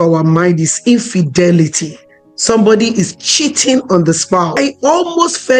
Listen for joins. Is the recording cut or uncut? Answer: cut